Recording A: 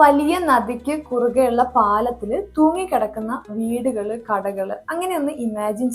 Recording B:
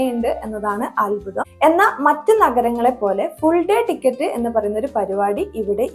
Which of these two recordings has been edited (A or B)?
B